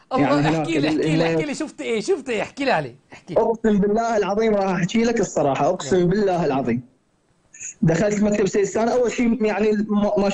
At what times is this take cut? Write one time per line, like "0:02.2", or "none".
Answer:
none